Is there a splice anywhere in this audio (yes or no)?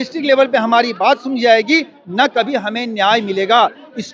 no